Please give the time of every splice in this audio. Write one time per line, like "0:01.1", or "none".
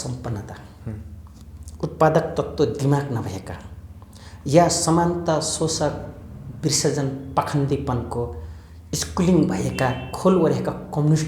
none